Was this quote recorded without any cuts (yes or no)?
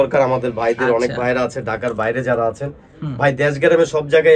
yes